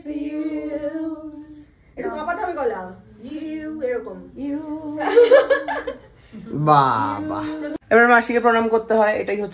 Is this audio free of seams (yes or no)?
no